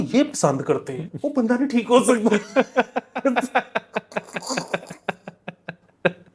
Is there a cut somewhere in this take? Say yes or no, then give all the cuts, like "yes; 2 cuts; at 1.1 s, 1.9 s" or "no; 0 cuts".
no; 0 cuts